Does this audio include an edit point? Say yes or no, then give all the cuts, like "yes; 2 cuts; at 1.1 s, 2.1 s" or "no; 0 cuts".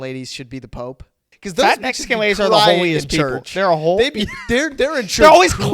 yes; 1 cut; at 1.2 s